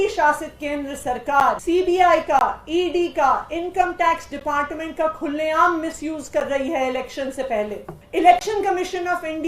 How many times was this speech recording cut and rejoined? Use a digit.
2